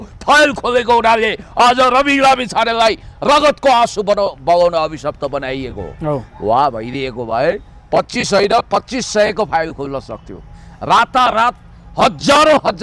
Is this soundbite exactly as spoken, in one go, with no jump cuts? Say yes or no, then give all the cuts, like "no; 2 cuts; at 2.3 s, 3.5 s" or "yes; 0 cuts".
yes; 0 cuts